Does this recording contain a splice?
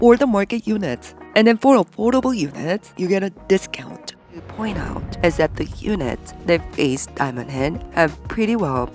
yes; 1 cut; at 4.5 s

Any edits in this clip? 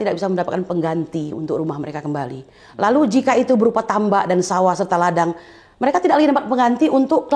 no; 0 cuts

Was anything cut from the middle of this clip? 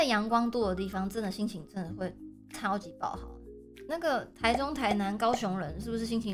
no; 0 cuts

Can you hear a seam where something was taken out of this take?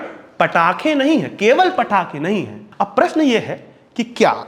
no; 0 cuts

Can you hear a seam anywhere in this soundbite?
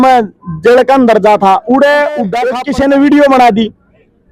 yes; 1 cut; at 2.4 s

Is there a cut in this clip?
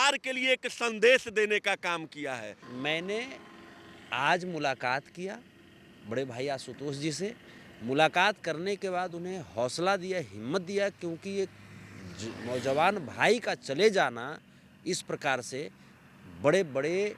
yes; 1 cut; at 2.7 s

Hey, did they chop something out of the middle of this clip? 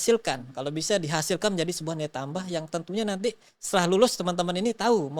no; 0 cuts

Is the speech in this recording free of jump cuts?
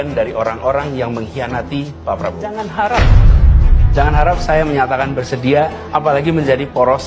no; 1 cut; at 2.6 s

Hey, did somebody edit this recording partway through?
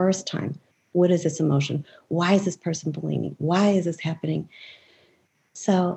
no; 0 cuts

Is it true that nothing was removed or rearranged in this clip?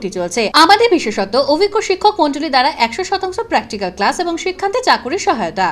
yes; 0 cuts

